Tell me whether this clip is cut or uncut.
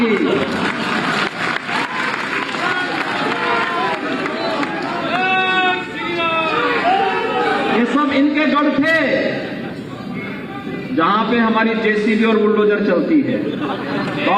uncut